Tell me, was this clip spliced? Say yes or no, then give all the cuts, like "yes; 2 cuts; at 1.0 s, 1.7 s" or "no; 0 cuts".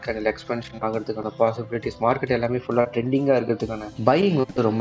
yes; 1 cut; at 3.9 s